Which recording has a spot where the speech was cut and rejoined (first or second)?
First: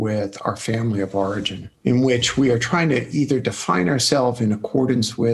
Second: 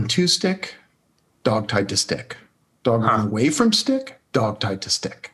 first